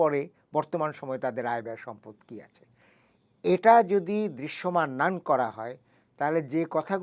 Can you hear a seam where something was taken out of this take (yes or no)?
no